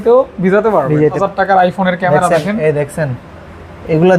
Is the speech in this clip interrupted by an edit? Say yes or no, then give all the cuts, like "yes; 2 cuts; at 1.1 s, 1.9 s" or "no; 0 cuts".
yes; 1 cut; at 1.2 s